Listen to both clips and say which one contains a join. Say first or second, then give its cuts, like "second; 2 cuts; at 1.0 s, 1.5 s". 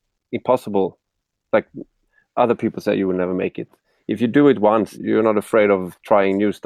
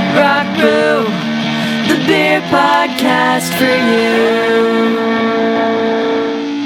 first; 1 cut; at 4.9 s